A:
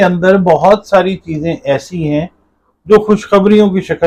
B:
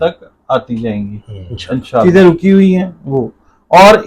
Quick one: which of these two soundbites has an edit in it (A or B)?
B